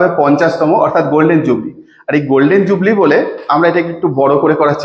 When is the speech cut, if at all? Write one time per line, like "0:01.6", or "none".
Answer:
none